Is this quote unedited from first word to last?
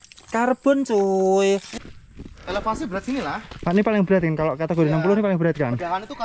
no; 1 cut; at 1.7 s

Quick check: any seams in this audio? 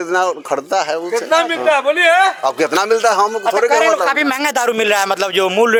no; 0 cuts

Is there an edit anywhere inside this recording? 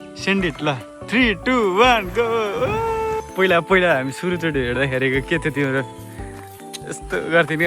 yes; 1 cut; at 3.2 s

